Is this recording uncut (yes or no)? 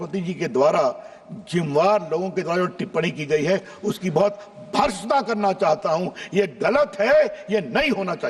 yes